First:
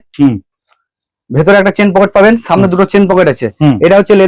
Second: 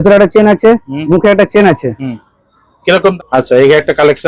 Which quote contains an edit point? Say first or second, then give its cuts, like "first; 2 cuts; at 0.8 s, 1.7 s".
second; 1 cut; at 3.1 s